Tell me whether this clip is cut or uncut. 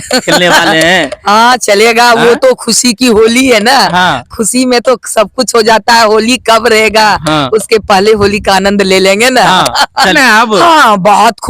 cut